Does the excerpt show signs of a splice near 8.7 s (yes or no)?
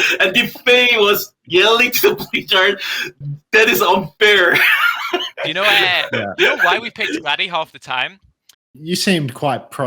yes